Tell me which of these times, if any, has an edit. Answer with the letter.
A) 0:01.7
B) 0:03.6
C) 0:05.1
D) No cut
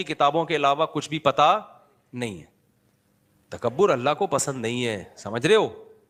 D